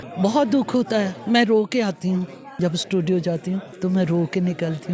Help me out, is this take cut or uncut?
cut